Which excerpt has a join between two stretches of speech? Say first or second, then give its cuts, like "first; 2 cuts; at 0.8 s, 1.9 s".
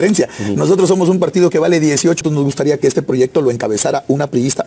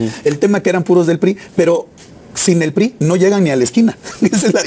first; 1 cut; at 2.2 s